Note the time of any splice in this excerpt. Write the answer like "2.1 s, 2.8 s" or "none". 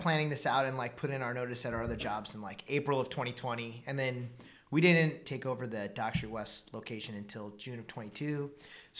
5.2 s